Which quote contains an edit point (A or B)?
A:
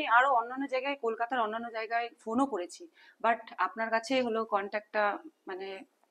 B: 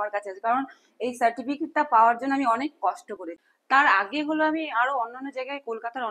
B